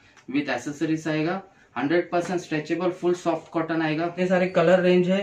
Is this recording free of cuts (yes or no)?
no